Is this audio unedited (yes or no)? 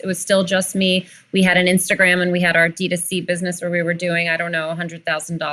yes